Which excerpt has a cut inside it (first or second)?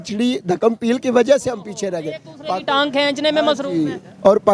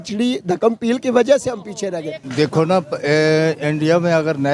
second